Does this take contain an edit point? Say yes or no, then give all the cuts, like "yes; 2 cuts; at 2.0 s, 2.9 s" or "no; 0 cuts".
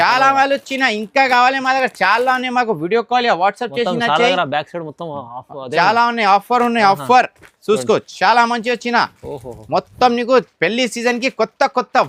no; 0 cuts